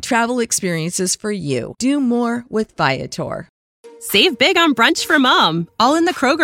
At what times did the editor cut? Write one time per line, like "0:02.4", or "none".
0:03.5

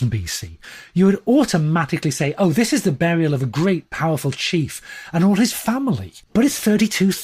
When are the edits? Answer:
0:06.1

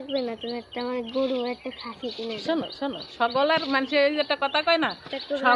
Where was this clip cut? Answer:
none

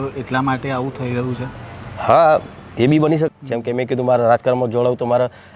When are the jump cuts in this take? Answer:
0:03.3

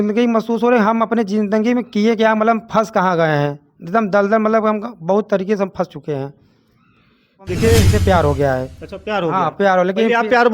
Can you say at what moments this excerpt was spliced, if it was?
0:07.9

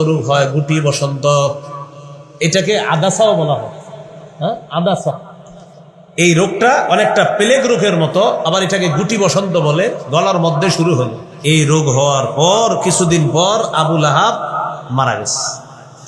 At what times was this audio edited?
0:11.2
0:14.8

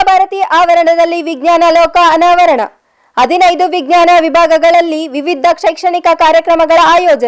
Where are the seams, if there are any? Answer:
none

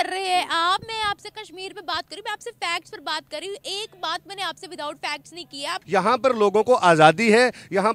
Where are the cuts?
0:05.8

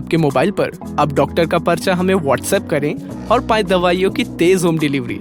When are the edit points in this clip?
none

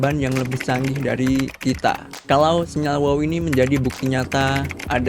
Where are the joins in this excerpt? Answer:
0:02.1

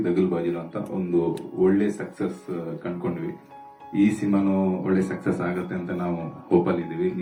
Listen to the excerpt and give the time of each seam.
none

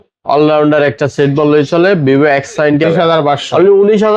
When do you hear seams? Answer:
0:02.8

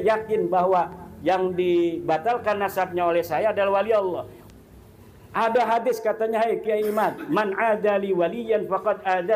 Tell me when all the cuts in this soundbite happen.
0:04.4

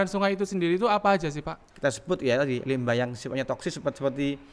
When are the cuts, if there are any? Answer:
0:01.6

